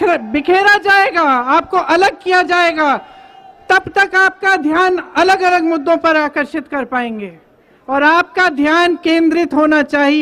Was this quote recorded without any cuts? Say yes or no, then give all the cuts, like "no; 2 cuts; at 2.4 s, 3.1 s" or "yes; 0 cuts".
yes; 0 cuts